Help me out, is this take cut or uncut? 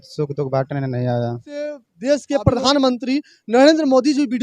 cut